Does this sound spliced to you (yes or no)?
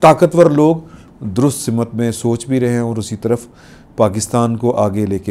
yes